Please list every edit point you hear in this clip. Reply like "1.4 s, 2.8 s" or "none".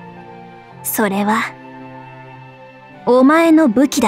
0.9 s